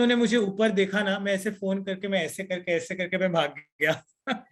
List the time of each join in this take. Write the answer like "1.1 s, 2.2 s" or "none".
none